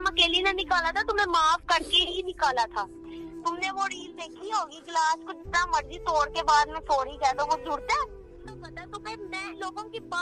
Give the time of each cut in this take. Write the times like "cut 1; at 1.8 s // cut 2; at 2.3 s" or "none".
cut 1; at 3.0 s // cut 2; at 8.8 s